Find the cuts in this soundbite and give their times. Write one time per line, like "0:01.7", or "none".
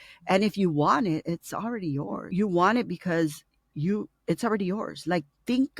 0:02.3